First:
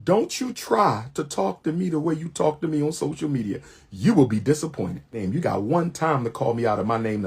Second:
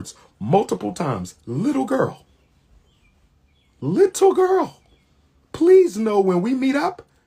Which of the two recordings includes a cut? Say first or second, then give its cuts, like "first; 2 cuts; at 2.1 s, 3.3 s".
first; 1 cut; at 5.2 s